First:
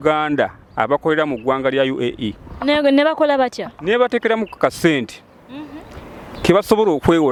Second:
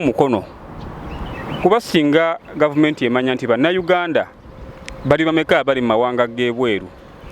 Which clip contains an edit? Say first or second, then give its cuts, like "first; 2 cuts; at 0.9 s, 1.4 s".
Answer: second; 1 cut; at 1.4 s